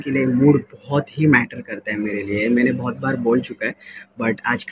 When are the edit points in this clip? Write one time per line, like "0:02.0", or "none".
none